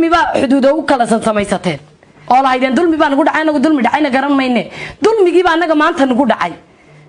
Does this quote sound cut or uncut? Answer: uncut